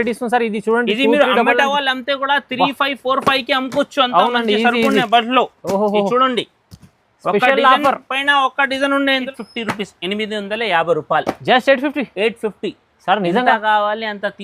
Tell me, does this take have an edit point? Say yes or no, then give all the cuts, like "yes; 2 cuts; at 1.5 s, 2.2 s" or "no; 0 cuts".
yes; 1 cut; at 9.3 s